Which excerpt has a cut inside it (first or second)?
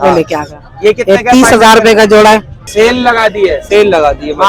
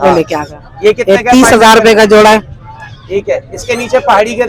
first